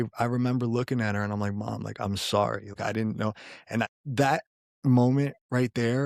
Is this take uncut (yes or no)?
no